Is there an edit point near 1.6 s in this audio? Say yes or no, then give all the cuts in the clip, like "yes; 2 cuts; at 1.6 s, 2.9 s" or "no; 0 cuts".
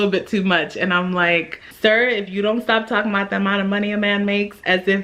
yes; 1 cut; at 1.6 s